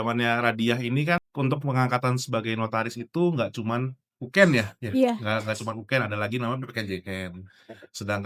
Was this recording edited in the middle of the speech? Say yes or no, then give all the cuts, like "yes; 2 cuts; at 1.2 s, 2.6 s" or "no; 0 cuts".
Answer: yes; 1 cut; at 1.3 s